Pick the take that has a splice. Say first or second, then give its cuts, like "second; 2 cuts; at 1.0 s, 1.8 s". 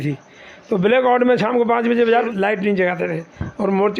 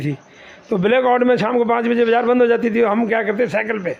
first; 1 cut; at 2.2 s